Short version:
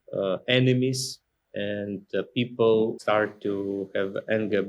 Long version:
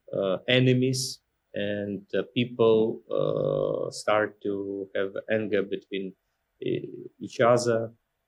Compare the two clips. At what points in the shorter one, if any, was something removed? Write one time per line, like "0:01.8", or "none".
0:03.0